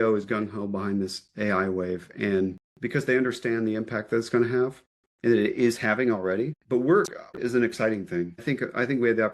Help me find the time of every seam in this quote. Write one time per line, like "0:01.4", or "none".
0:06.6
0:07.4
0:08.4